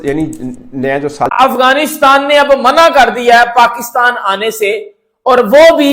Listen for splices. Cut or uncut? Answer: cut